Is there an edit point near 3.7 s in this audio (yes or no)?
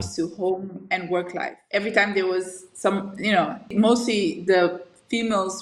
yes